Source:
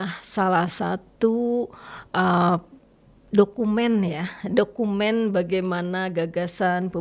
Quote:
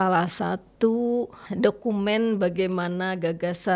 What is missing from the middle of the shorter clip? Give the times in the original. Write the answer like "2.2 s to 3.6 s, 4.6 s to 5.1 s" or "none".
1.8 s to 4.3 s